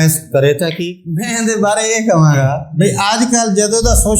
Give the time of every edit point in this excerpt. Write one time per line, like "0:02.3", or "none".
0:01.3
0:02.6